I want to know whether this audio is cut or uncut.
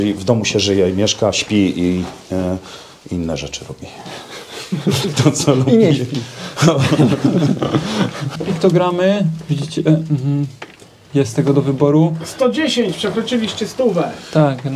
cut